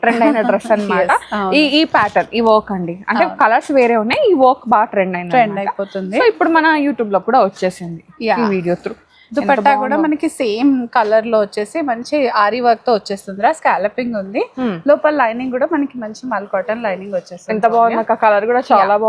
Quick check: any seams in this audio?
no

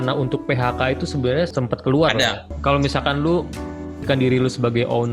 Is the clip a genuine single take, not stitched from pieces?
no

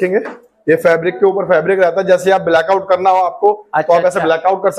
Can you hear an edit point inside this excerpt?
no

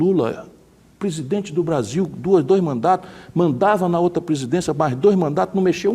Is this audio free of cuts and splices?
yes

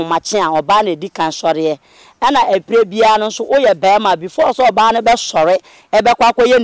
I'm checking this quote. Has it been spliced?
no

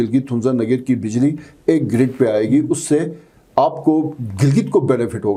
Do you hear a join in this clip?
no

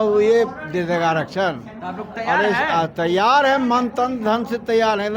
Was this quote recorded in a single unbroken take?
yes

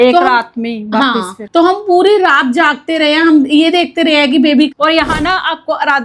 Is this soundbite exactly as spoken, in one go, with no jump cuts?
no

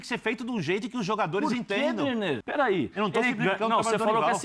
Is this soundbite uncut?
no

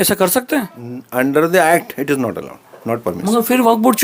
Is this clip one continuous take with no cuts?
yes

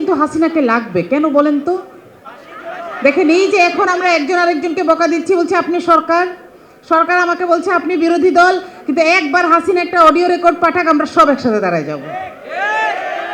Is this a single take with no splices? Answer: yes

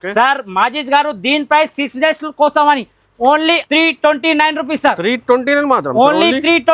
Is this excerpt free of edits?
no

